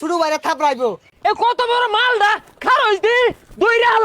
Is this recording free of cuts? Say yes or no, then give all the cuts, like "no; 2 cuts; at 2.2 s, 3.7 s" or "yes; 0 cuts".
no; 1 cut; at 1.1 s